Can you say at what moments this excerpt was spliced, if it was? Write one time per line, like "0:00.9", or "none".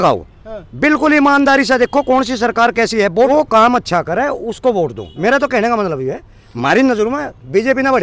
0:03.3